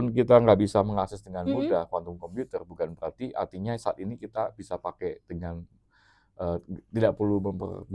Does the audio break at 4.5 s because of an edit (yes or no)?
no